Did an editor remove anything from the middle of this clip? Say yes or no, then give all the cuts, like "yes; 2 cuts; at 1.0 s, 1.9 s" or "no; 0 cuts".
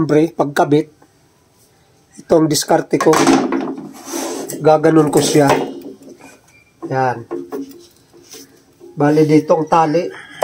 no; 0 cuts